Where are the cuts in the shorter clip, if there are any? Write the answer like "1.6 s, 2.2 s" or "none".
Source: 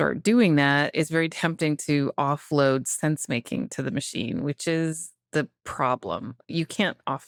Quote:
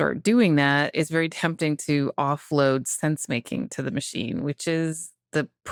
none